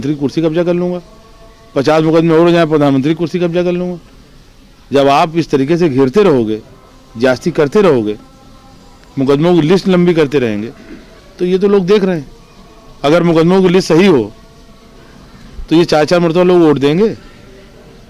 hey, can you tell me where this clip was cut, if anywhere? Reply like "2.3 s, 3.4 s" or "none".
none

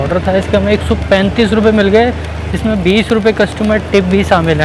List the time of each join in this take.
none

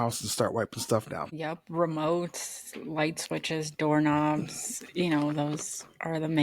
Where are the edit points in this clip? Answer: 1.2 s

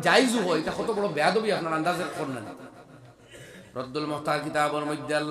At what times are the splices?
none

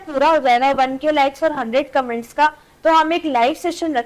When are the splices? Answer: none

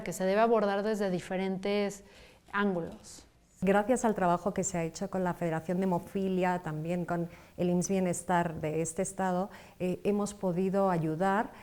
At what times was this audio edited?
3.6 s, 9.6 s

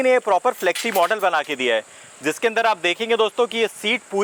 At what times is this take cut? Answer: none

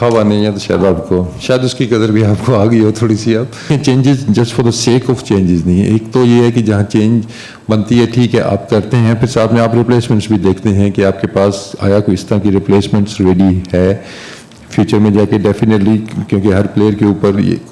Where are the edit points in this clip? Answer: 3.7 s

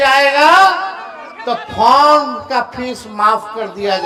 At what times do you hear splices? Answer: none

